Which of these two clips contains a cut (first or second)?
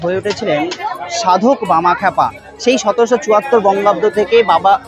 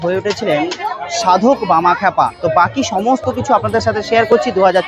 second